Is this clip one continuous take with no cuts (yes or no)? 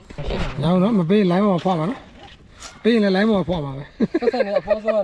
yes